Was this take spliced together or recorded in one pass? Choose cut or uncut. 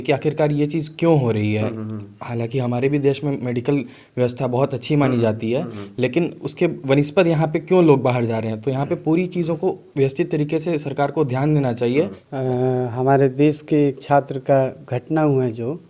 cut